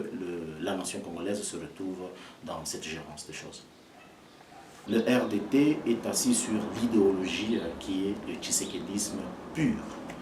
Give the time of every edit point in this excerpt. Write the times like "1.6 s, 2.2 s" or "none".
4.7 s